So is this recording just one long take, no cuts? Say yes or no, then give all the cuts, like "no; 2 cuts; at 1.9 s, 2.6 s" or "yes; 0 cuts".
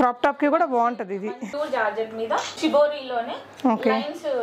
no; 2 cuts; at 1.4 s, 2.5 s